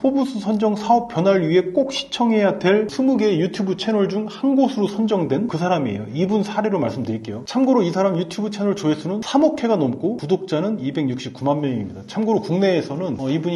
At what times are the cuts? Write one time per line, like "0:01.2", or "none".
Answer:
none